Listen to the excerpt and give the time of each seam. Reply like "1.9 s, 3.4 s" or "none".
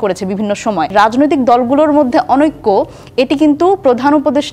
0.9 s